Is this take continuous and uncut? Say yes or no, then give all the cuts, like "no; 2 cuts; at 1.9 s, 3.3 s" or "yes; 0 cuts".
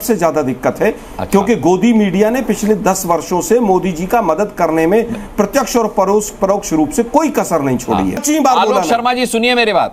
no; 1 cut; at 8.2 s